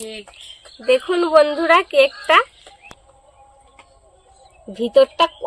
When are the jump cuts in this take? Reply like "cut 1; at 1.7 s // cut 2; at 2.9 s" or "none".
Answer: cut 1; at 3.0 s